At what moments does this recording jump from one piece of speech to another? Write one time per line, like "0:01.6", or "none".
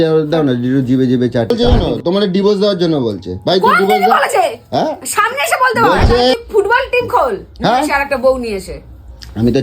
0:01.5
0:06.4

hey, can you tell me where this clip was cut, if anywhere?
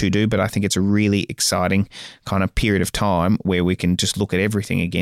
none

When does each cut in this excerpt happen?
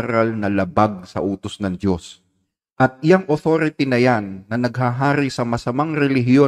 0:02.1

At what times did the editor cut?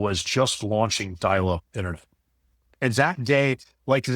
0:02.7

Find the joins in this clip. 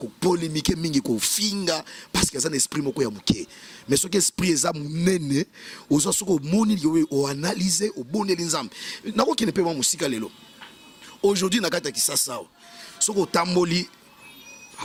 none

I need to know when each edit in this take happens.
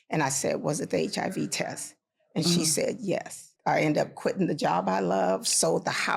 0:03.5

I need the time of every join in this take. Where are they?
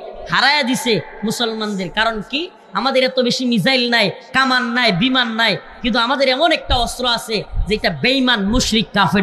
none

